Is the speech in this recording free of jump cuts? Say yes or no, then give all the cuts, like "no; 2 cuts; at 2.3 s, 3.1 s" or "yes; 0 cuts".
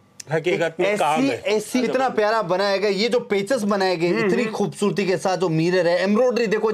no; 1 cut; at 1.8 s